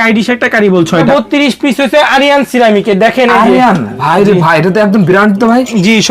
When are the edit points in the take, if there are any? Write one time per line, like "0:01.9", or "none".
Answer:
0:01.1